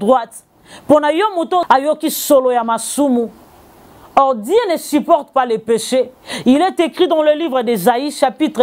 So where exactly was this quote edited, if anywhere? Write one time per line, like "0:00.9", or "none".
0:01.6